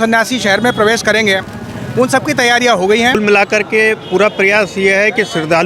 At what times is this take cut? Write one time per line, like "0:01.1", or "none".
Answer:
0:03.2